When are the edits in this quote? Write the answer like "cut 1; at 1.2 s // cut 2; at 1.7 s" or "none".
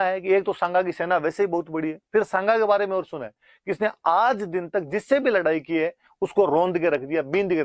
none